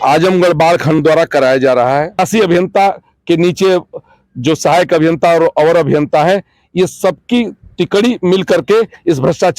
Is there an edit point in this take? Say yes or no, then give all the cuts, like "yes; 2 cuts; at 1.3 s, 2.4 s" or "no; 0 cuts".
yes; 1 cut; at 2.2 s